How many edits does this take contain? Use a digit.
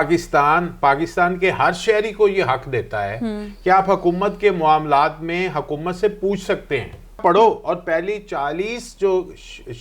1